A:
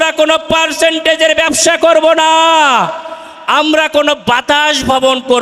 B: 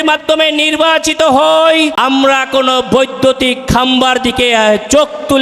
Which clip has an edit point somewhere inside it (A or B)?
B